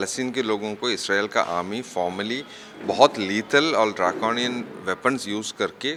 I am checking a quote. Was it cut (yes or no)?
no